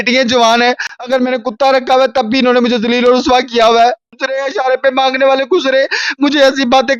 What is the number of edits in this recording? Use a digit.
1